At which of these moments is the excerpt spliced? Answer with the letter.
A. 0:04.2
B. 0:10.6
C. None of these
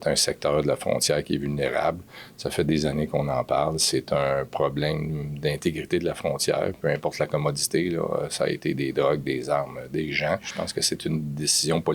B